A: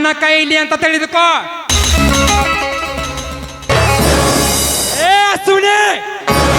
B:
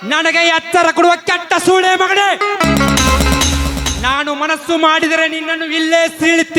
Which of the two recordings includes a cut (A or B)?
A